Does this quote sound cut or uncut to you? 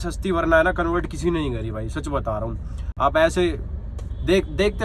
uncut